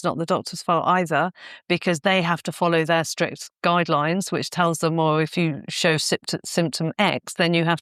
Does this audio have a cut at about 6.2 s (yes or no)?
no